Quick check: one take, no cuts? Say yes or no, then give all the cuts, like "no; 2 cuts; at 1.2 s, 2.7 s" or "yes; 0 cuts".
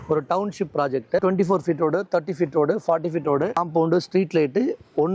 no; 2 cuts; at 1.2 s, 3.6 s